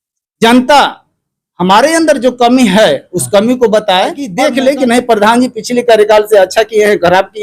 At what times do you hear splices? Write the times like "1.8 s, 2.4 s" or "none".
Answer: 4.2 s